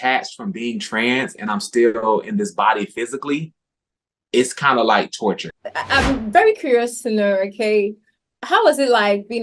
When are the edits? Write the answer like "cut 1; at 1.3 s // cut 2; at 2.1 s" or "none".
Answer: cut 1; at 5.5 s